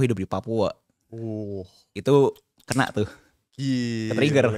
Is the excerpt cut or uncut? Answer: uncut